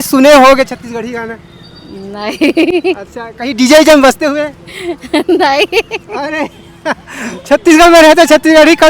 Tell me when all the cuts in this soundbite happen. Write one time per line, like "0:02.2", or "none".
none